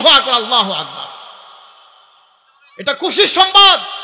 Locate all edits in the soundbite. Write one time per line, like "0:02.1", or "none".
none

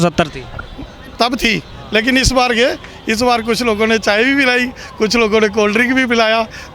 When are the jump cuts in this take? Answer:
none

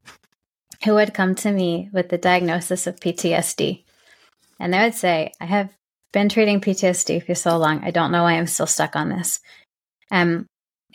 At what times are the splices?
none

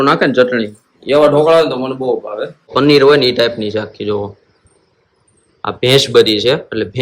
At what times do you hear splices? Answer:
0:02.7

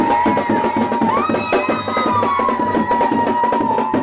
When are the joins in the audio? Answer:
none

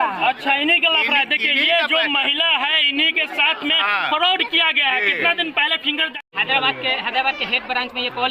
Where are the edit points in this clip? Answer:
0:06.2

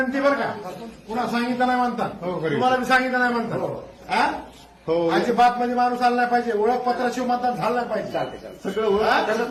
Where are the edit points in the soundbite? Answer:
none

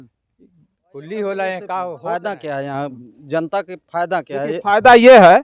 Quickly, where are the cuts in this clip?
0:02.0

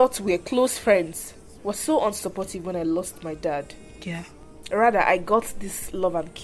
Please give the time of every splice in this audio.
none

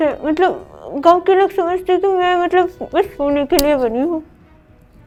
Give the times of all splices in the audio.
none

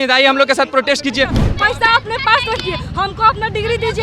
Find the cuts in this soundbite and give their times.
0:01.4

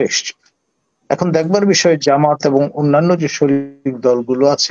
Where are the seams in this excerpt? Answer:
none

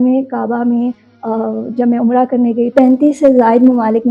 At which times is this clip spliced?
0:02.7

